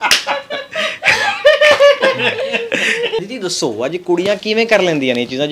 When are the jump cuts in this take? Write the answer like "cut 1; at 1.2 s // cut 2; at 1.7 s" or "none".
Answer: cut 1; at 3.2 s